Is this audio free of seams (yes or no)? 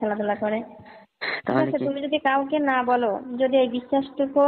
yes